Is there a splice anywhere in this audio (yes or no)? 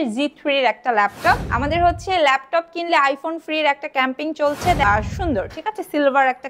yes